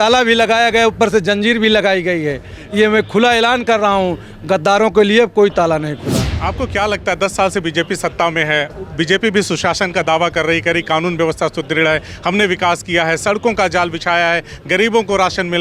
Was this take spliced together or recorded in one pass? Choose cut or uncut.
cut